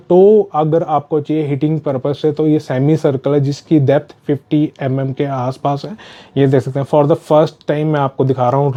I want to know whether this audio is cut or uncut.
uncut